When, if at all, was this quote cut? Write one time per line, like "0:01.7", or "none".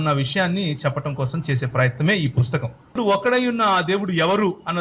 0:03.0